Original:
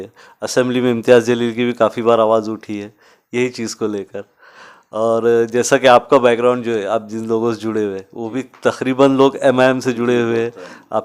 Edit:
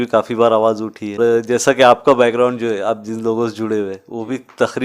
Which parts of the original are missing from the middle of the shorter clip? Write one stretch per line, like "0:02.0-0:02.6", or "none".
0:02.8-0:05.2